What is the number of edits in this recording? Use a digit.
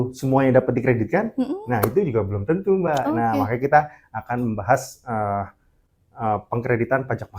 0